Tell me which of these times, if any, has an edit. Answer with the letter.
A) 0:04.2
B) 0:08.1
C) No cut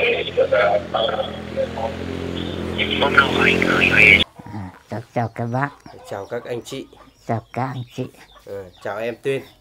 A